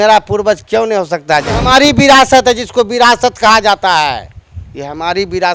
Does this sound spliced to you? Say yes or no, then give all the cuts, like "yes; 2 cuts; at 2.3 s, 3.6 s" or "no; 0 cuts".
yes; 1 cut; at 1.6 s